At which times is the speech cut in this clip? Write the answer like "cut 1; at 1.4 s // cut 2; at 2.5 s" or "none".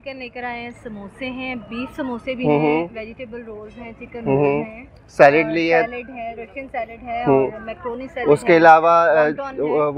none